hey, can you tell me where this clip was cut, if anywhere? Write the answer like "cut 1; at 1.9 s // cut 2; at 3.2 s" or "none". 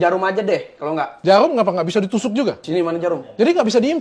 cut 1; at 1.1 s // cut 2; at 2.6 s